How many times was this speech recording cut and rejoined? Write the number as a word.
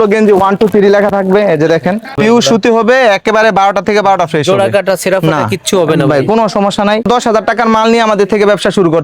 two